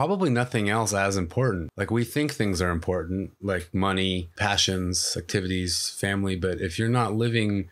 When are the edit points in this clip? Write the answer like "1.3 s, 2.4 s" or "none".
1.7 s, 4.3 s